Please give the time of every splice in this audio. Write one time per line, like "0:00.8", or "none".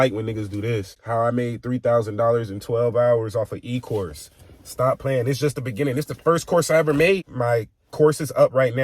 0:00.9
0:07.2